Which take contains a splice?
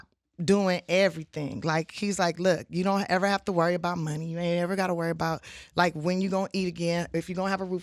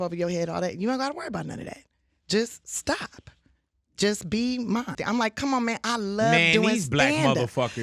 second; 1 cut; at 5.0 s

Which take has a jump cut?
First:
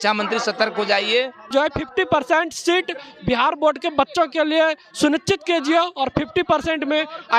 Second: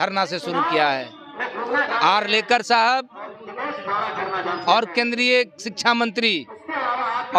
first; 1 cut; at 1.5 s

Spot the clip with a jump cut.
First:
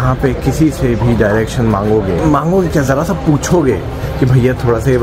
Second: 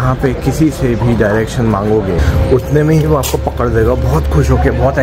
second; 1 cut; at 2.2 s

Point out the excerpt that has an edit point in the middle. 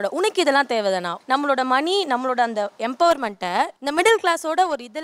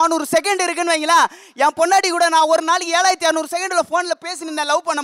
first; 2 cuts; at 1.1 s, 3.8 s

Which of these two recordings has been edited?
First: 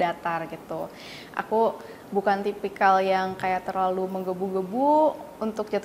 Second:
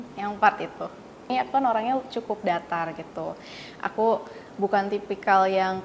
second; 1 cut; at 1.3 s

